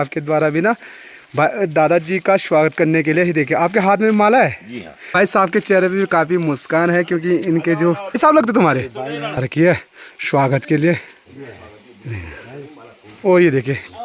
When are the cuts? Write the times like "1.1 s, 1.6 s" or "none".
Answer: 5.1 s, 7.8 s, 9.4 s